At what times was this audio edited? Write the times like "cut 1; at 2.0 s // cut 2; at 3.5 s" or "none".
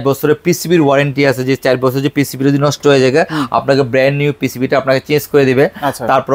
none

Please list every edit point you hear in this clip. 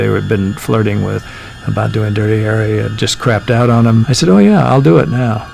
cut 1; at 1.2 s // cut 2; at 2.9 s // cut 3; at 4.1 s

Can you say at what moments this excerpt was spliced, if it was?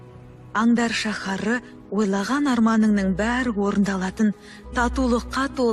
none

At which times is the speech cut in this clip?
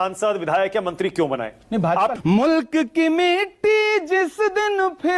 cut 1; at 2.1 s

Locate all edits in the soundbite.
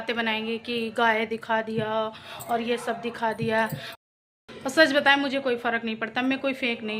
cut 1; at 3.9 s

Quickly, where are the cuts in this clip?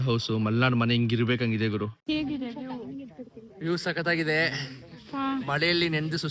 cut 1; at 1.9 s

